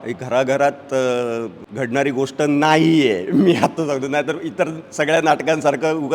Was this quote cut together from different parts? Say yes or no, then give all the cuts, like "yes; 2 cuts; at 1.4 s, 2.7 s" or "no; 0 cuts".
yes; 1 cut; at 1.6 s